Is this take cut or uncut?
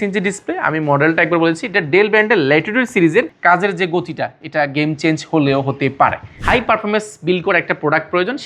cut